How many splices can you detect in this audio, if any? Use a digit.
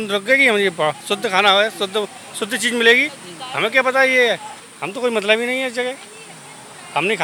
0